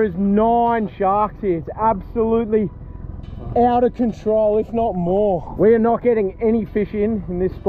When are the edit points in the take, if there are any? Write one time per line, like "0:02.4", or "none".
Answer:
0:05.5